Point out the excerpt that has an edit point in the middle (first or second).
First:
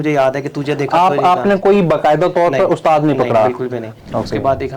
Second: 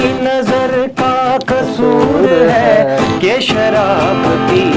first